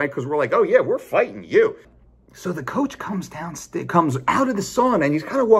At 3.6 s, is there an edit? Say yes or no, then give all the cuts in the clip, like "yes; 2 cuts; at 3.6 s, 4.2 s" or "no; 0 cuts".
no; 1 cut; at 1.9 s